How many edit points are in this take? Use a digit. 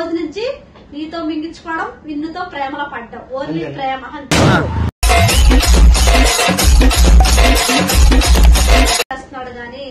1